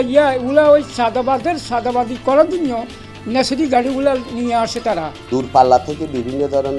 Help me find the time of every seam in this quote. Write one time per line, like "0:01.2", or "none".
0:05.2